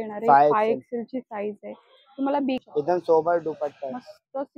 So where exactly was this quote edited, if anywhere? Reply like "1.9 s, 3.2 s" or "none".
2.7 s